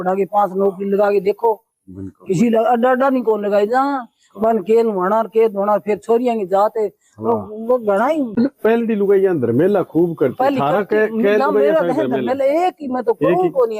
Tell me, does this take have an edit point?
no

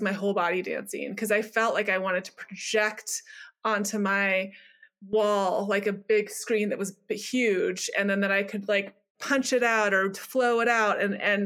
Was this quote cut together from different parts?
yes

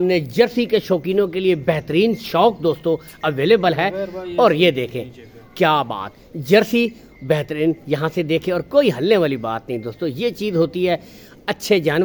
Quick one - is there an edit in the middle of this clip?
no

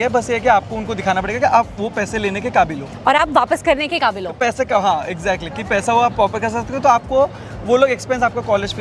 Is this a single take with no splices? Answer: yes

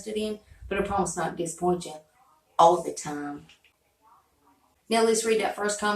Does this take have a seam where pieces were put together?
yes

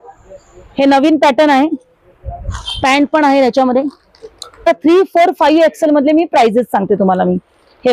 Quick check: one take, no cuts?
yes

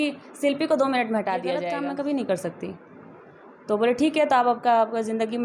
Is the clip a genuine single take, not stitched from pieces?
no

